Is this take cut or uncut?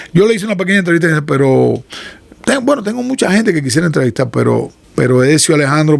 cut